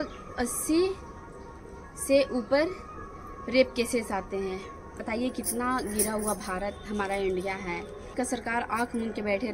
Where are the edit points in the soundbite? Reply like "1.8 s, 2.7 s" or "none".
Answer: 4.9 s, 8.1 s